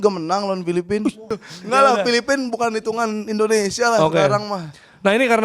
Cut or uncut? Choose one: cut